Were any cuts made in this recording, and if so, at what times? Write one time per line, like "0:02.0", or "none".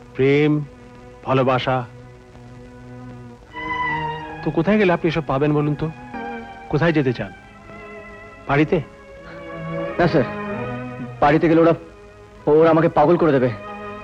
0:06.2